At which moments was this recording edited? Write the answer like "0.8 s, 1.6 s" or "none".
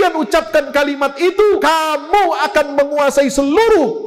1.6 s